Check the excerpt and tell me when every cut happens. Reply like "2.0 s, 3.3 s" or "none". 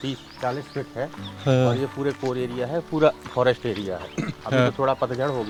none